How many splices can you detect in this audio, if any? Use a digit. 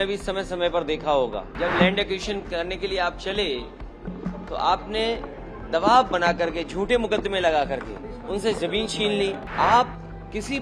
2